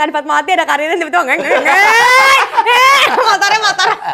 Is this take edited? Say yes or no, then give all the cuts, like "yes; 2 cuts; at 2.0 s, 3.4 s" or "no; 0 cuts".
no; 0 cuts